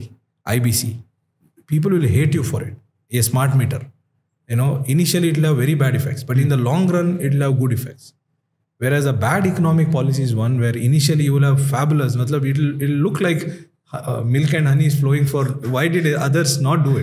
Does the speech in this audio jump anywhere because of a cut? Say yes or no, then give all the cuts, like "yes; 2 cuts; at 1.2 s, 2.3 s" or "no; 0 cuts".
no; 0 cuts